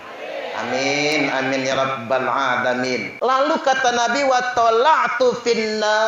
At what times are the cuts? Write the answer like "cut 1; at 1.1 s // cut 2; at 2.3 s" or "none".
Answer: cut 1; at 3.1 s